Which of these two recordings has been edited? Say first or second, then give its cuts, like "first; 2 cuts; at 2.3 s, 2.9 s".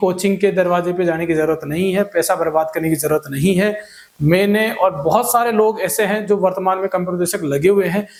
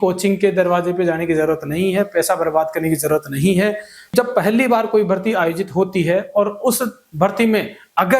second; 1 cut; at 4.1 s